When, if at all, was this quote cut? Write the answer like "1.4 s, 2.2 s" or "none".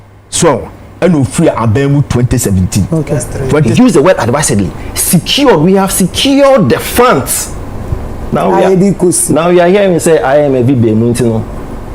3.7 s